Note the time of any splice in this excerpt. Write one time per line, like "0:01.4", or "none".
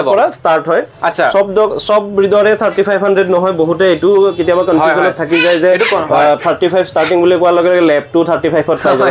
none